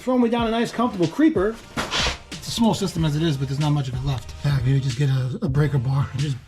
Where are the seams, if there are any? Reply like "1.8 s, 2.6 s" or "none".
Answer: 2.2 s, 4.4 s

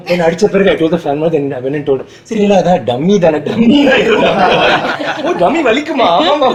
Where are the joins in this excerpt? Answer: none

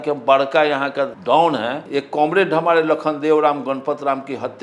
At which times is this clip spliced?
1.2 s, 1.8 s

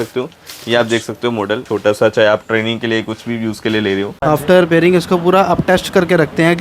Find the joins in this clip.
1.6 s, 4.2 s

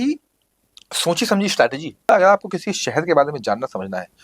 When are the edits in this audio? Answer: 2.1 s

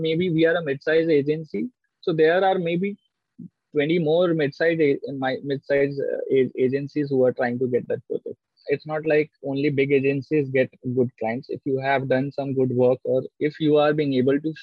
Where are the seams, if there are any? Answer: 8.5 s

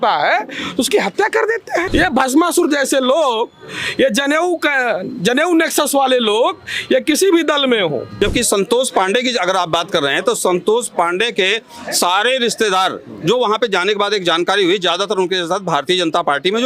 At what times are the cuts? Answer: 1.9 s, 8.2 s

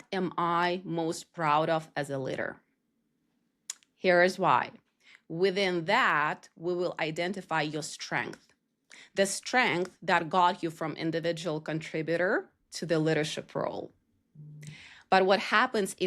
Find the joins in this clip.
none

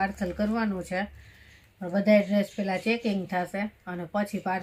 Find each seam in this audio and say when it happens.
none

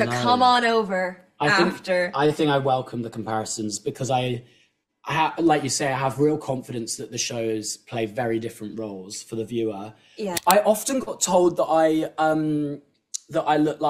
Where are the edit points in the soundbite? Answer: 10.3 s

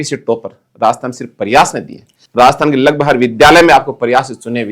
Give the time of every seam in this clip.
2.1 s

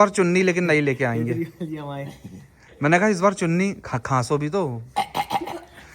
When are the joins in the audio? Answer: none

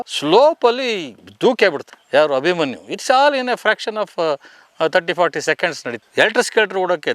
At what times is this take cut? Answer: 6.0 s

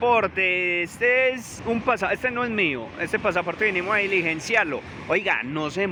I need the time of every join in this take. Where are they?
none

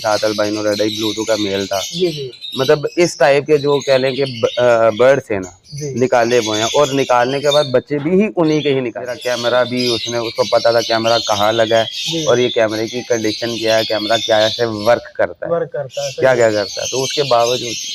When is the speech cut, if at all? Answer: 9.2 s

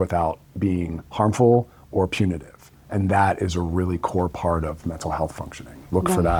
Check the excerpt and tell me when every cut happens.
none

